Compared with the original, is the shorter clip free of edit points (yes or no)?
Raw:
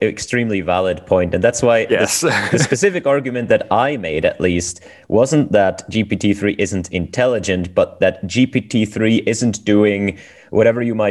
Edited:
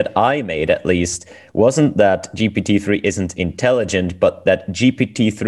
yes